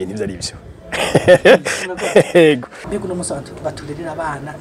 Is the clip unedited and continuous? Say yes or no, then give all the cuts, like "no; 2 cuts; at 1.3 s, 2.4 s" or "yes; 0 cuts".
no; 1 cut; at 2.8 s